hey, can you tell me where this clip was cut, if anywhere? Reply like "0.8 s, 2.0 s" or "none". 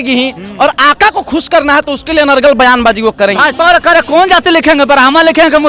3.4 s